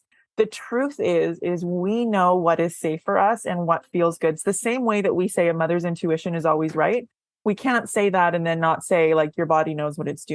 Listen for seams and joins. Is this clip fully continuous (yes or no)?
yes